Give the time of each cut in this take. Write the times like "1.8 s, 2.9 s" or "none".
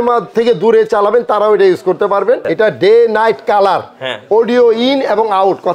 2.5 s